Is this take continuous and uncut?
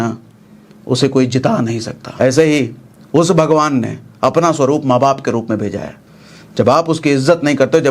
no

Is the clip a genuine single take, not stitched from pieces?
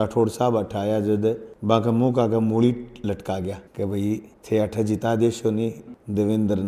yes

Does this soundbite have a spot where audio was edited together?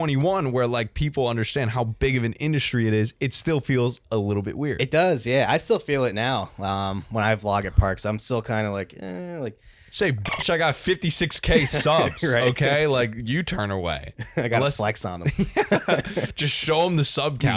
no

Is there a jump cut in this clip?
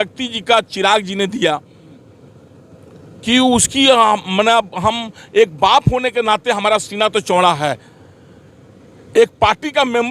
no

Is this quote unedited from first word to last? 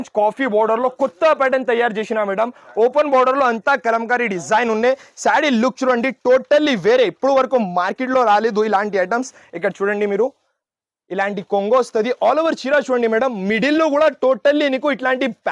yes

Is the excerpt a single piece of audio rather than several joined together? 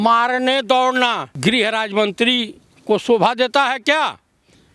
no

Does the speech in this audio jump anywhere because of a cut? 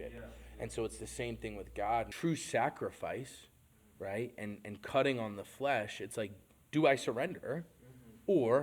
yes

